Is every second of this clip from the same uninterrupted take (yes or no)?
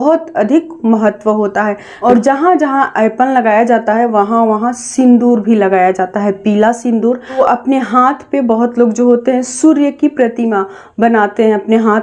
no